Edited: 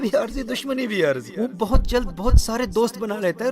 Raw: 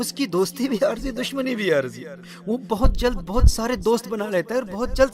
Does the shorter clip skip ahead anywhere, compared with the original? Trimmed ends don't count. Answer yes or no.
yes